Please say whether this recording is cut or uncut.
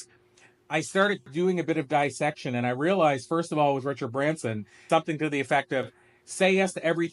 cut